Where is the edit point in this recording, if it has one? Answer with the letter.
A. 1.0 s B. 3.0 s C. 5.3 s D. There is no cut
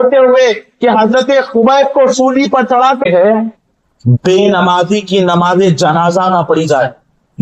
B